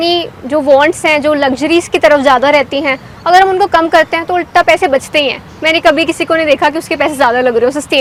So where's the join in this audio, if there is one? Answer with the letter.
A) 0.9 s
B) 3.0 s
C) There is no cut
C